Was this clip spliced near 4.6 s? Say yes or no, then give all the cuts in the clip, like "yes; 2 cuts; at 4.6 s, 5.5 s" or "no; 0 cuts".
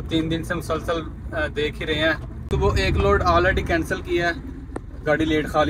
no; 1 cut; at 2.3 s